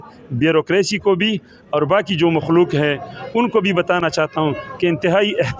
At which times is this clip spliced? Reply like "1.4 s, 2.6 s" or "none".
none